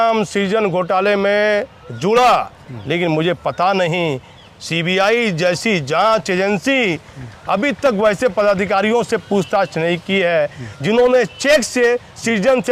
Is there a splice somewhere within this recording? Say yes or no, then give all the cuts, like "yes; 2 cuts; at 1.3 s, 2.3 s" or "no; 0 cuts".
no; 0 cuts